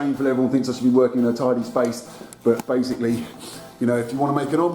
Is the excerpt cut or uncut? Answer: uncut